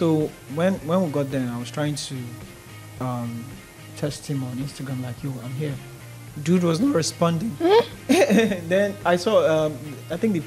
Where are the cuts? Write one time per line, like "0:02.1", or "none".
none